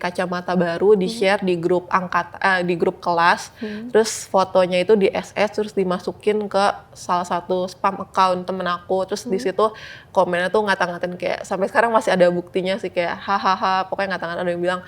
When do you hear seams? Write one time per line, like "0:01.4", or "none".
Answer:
none